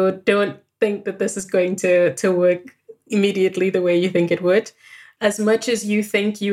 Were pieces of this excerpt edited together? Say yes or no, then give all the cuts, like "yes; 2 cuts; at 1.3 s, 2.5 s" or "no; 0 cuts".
no; 0 cuts